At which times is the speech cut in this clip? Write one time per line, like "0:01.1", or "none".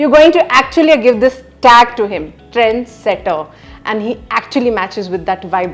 none